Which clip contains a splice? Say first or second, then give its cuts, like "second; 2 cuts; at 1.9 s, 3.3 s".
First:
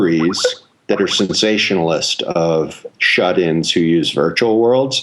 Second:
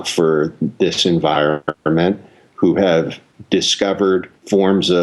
first; 1 cut; at 2.8 s